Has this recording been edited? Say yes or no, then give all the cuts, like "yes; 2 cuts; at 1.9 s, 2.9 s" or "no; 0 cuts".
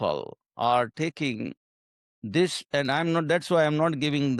no; 0 cuts